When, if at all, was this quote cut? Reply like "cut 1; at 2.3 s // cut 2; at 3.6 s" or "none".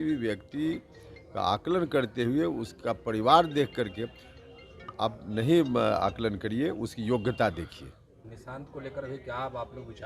cut 1; at 8.3 s